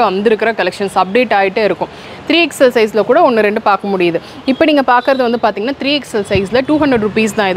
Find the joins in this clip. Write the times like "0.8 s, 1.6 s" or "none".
none